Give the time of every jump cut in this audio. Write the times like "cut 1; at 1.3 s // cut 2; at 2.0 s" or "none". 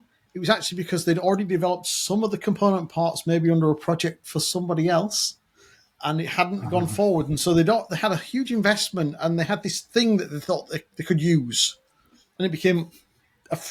none

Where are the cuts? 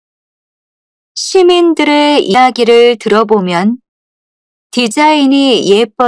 cut 1; at 2.3 s

